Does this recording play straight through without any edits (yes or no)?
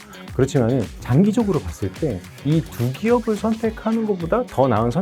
yes